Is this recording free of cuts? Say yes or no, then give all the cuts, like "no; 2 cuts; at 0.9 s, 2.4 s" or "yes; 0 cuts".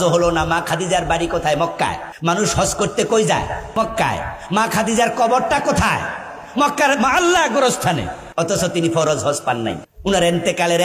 no; 4 cuts; at 2.1 s, 3.7 s, 8.2 s, 9.9 s